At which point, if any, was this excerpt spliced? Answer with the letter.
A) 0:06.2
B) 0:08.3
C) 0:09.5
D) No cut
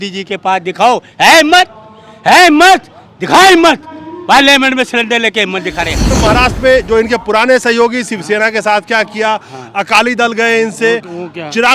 A